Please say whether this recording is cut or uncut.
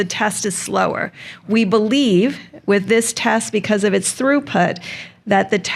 uncut